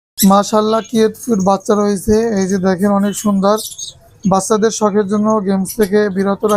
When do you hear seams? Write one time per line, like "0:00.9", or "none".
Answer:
none